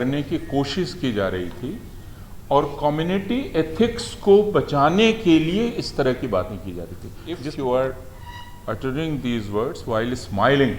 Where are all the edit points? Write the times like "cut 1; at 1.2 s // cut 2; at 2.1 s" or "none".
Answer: cut 1; at 7.5 s